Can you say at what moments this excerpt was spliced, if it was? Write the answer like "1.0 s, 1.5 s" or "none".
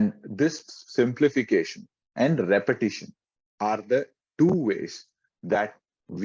none

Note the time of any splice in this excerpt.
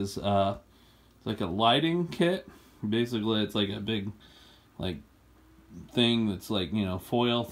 none

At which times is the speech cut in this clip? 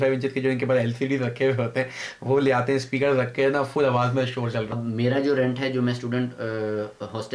4.7 s

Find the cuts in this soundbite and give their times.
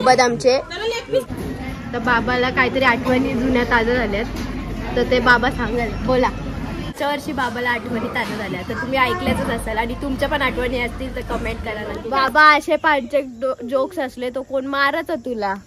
1.6 s, 7.0 s, 12.0 s

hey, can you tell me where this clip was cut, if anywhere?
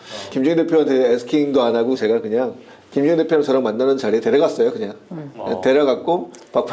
none

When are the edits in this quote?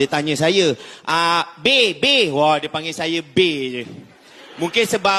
none

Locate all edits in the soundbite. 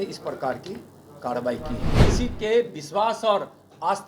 2.0 s

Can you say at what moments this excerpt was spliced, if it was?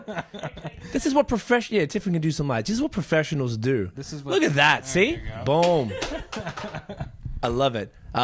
none

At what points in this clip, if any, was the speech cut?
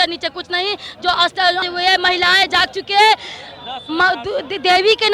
1.6 s

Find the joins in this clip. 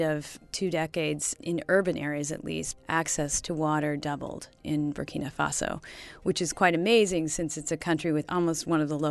1.4 s, 4.6 s, 8.3 s

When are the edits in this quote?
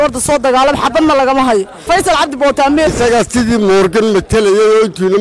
1.8 s, 2.9 s

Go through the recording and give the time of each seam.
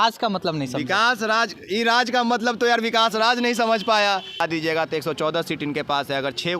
4.4 s

